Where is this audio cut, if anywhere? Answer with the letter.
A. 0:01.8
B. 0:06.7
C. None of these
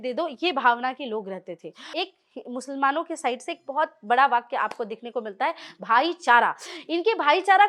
A